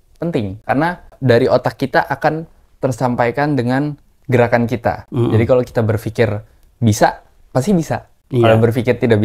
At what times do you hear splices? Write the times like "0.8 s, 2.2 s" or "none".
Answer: 1.1 s